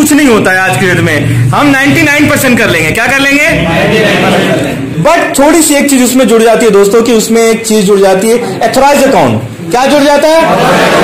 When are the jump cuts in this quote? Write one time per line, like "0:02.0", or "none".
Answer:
0:04.9